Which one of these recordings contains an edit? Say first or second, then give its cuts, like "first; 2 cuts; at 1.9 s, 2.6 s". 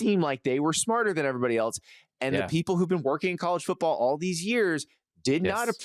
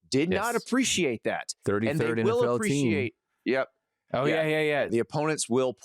second; 1 cut; at 4.9 s